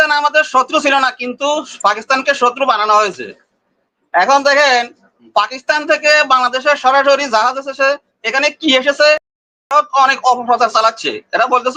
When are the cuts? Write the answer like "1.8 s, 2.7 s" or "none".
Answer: none